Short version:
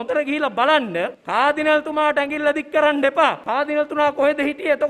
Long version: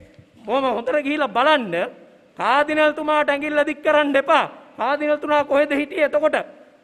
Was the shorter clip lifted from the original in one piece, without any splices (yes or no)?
no